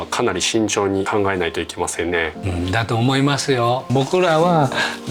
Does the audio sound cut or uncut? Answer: cut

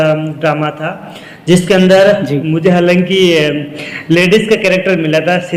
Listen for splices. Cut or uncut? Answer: uncut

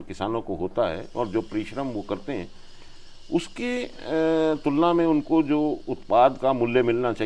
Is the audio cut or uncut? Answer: uncut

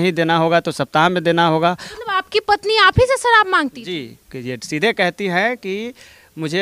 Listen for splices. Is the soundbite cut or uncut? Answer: uncut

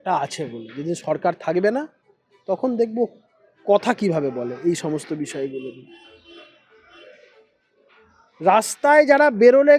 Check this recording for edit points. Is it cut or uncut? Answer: uncut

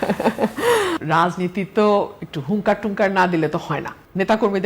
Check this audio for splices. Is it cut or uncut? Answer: cut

